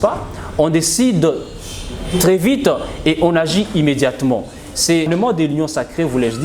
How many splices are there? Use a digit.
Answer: 1